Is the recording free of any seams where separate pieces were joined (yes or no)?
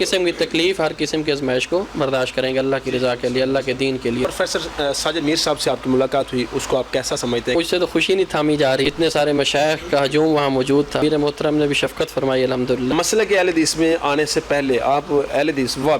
no